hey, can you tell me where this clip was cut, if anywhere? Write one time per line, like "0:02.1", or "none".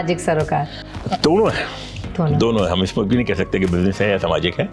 none